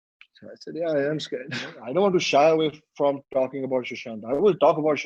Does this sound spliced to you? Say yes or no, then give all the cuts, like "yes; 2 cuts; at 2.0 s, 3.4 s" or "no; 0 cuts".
yes; 1 cut; at 1.8 s